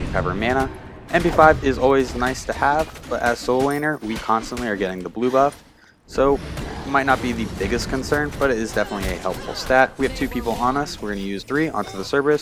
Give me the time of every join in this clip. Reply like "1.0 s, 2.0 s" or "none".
11.4 s

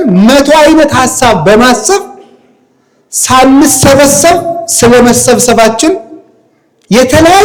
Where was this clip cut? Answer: none

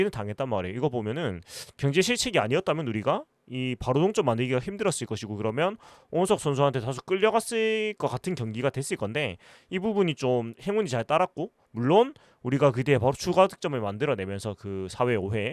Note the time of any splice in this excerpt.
none

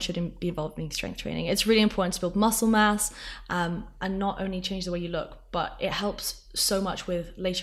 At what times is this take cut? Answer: none

